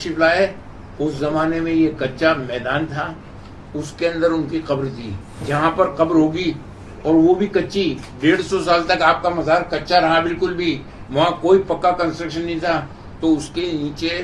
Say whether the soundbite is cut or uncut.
cut